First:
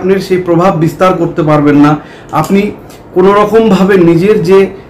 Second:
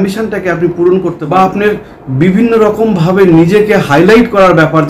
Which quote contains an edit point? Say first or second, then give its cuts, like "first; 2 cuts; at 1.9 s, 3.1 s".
second; 1 cut; at 1.2 s